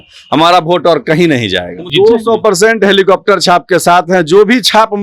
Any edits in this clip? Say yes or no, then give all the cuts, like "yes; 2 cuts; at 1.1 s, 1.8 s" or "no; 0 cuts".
yes; 1 cut; at 1.8 s